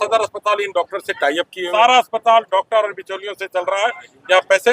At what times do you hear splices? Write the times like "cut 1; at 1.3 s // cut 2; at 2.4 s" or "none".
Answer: cut 1; at 1.6 s